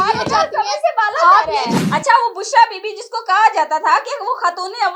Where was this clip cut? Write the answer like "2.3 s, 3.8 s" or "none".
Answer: 1.8 s